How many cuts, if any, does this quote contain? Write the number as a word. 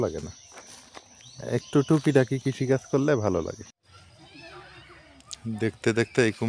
one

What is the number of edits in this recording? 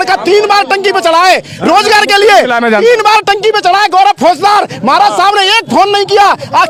zero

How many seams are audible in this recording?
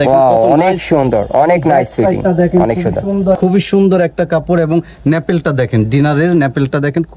one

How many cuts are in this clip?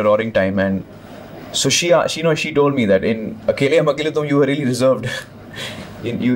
zero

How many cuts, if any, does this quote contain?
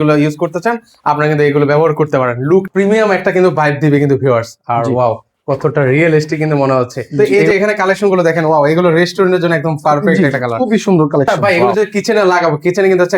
three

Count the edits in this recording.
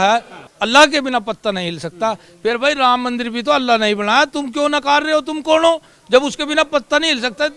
zero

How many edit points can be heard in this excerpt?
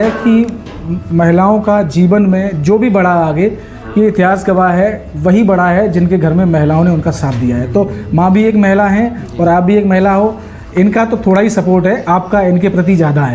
zero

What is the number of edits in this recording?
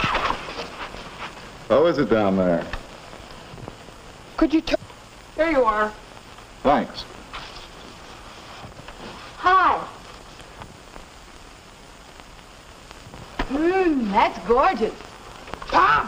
zero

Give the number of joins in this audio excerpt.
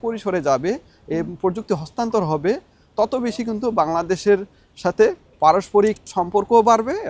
two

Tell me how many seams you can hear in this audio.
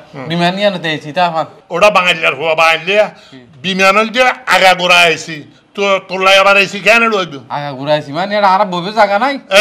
zero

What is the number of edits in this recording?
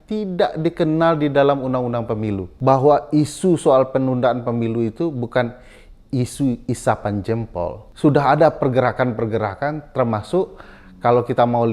two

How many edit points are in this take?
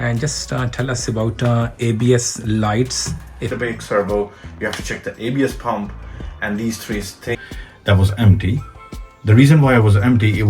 two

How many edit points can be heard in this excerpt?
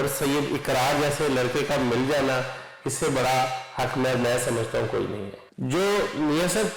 one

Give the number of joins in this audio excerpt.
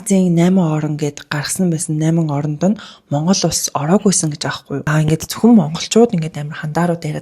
one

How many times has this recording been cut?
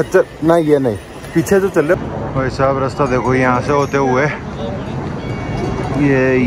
one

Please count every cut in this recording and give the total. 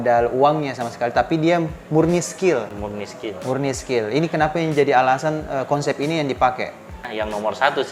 one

